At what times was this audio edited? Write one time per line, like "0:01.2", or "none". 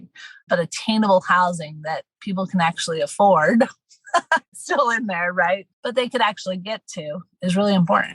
0:04.6
0:07.2